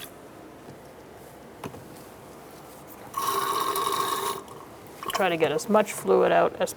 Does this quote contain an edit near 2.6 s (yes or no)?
no